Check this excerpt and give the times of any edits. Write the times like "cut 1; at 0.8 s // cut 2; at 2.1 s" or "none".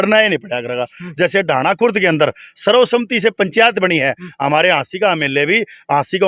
none